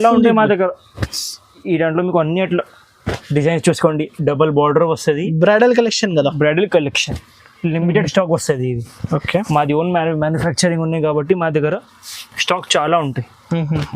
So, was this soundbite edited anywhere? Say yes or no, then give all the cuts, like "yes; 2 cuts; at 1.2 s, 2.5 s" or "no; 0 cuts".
yes; 1 cut; at 1.6 s